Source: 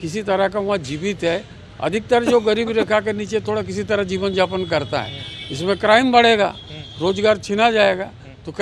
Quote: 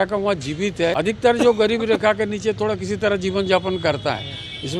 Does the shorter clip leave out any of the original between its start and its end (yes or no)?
yes